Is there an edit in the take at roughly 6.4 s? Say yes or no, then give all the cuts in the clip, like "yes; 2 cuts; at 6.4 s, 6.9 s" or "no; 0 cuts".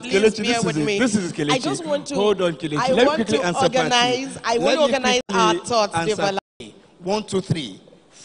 yes; 1 cut; at 6.4 s